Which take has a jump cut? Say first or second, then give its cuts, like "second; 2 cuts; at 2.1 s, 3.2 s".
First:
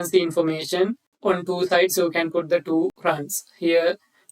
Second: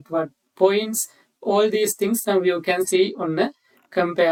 first; 2 cuts; at 1.1 s, 3.0 s